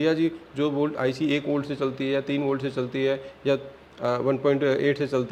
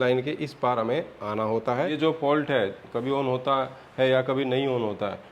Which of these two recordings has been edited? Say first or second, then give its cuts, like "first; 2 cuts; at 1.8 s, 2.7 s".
second; 1 cut; at 1.9 s